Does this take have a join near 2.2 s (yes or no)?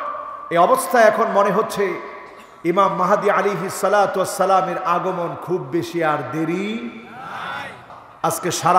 no